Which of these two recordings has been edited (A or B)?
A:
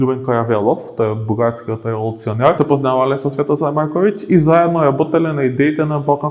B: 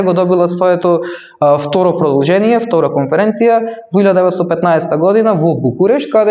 A